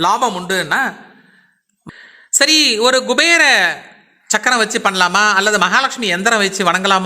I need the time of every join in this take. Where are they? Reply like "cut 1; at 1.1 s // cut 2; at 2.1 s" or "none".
cut 1; at 1.9 s